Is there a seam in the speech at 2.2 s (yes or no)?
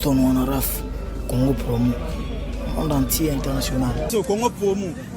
no